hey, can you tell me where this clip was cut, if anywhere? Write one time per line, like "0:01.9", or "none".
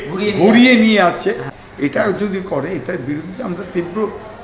0:01.4